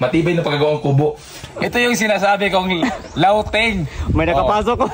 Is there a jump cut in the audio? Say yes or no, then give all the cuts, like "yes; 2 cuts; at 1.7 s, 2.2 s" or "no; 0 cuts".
yes; 1 cut; at 1.4 s